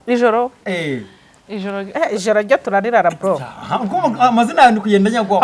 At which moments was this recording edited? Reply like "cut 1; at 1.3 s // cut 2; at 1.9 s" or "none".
none